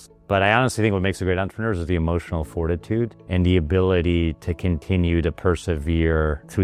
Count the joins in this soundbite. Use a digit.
0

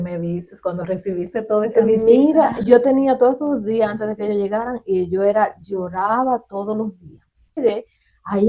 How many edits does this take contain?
1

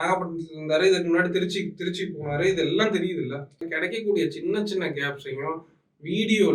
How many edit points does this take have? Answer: 1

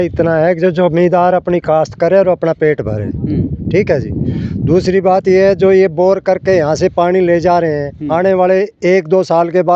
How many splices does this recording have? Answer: 0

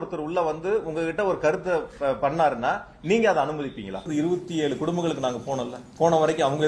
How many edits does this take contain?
2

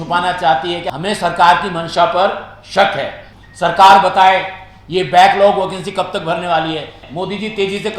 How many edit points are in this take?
3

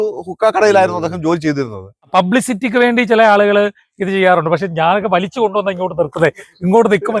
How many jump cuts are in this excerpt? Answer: 1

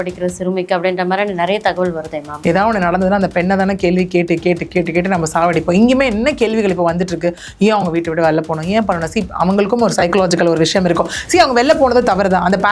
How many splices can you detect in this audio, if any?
1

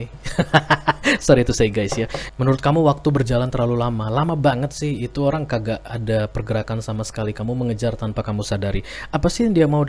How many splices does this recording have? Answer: 1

